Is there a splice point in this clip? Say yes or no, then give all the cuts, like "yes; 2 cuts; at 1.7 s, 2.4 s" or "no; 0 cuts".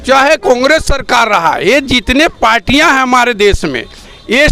no; 0 cuts